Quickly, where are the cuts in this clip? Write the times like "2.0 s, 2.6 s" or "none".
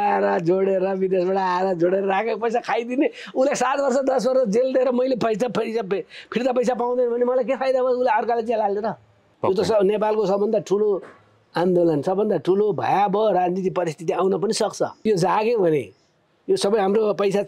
9.2 s, 15.0 s